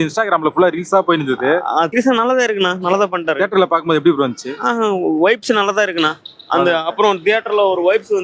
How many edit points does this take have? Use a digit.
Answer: 1